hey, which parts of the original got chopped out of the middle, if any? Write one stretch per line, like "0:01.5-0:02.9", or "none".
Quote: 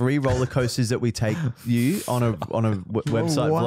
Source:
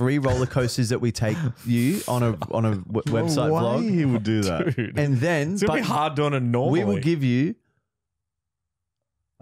none